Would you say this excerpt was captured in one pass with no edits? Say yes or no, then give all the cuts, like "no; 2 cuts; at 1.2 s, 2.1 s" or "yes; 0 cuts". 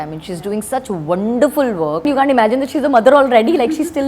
no; 1 cut; at 2.0 s